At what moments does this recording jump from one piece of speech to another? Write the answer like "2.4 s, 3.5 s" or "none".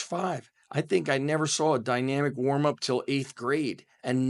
none